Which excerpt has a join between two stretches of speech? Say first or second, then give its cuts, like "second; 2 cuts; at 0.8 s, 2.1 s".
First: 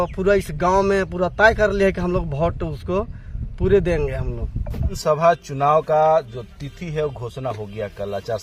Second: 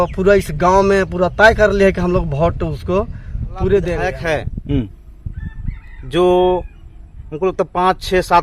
second; 1 cut; at 4.2 s